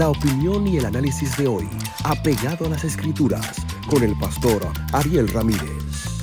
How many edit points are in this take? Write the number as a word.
zero